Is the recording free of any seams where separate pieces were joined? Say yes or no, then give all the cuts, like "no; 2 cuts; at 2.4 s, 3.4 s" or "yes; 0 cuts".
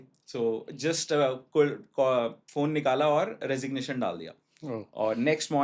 yes; 0 cuts